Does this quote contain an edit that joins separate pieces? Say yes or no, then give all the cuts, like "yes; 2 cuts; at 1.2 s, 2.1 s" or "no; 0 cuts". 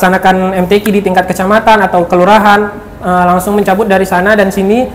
no; 0 cuts